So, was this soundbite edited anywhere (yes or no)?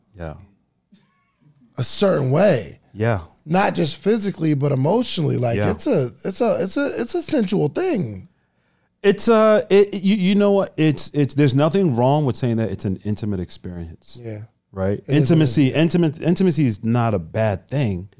no